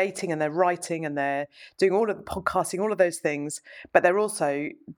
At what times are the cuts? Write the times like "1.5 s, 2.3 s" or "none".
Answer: none